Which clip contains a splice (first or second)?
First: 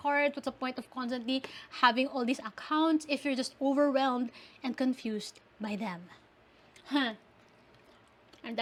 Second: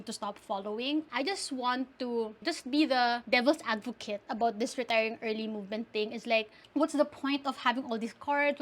second